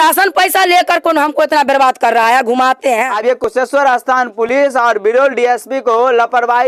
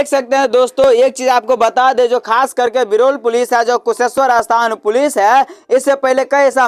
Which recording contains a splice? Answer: first; 1 cut; at 3.1 s

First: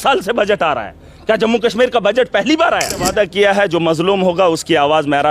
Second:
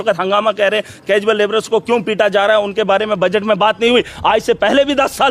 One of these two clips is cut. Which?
first; 1 cut; at 3.1 s

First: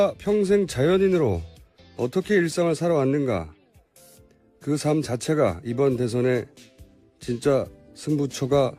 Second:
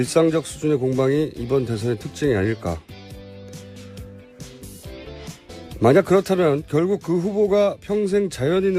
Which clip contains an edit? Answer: first; 1 cut; at 3.0 s

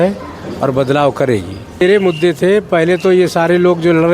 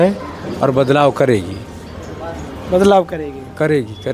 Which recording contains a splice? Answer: first; 1 cut; at 1.8 s

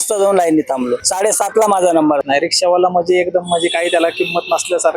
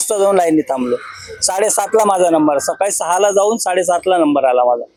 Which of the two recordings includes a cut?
first; 2 cuts; at 1.1 s, 2.2 s

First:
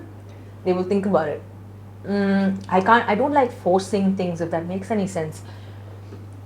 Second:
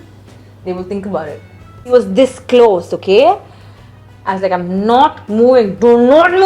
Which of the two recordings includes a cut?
second; 1 cut; at 1.7 s

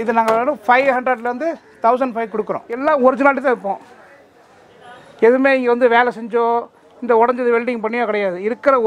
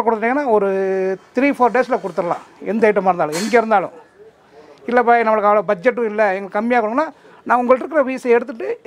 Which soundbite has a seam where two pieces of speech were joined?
first; 1 cut; at 2.8 s

